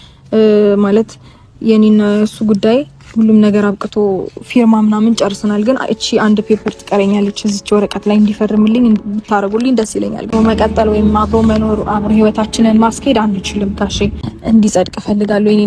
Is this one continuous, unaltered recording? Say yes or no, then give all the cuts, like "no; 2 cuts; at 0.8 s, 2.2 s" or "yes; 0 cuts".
no; 2 cuts; at 10.3 s, 14.3 s